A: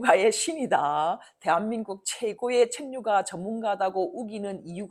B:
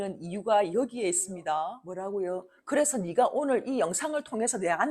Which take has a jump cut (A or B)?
B